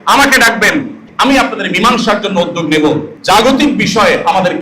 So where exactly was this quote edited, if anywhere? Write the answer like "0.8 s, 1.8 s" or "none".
1.0 s, 3.1 s